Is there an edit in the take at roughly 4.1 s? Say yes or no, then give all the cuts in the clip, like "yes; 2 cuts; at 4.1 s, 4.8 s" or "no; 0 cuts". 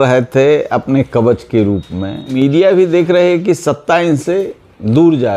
no; 1 cut; at 2.3 s